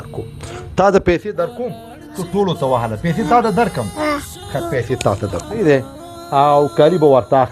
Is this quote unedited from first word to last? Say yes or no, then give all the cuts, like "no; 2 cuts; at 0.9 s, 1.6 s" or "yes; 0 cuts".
no; 1 cut; at 5.6 s